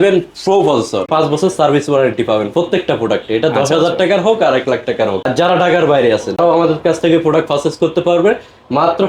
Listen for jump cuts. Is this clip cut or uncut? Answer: cut